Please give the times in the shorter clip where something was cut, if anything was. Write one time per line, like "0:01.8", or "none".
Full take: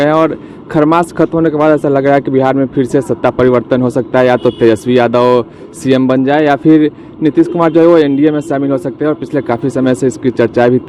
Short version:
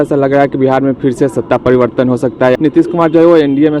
0:02.6